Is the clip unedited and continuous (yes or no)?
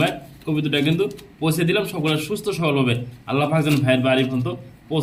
yes